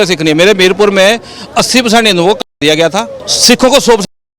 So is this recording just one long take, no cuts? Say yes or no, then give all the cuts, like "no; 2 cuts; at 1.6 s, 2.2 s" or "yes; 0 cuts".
no; 1 cut; at 3.2 s